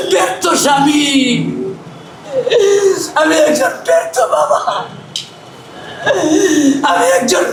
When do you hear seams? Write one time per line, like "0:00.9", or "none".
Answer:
none